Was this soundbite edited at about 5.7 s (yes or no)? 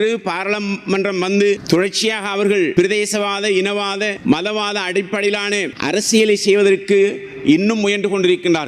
yes